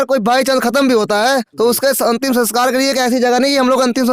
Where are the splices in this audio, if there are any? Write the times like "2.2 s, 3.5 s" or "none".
none

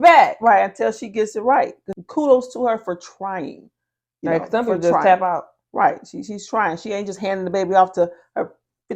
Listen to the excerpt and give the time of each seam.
1.9 s

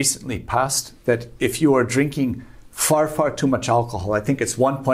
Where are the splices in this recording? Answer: none

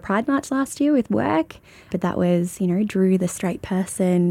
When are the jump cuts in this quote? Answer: 1.9 s

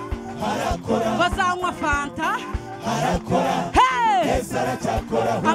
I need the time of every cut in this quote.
none

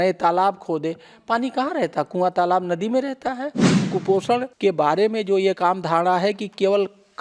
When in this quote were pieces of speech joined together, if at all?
3.9 s

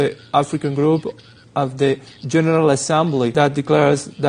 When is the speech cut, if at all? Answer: 3.3 s

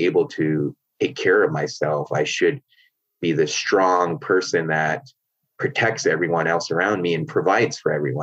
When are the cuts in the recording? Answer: none

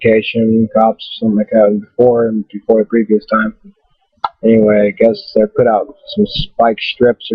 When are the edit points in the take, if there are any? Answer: none

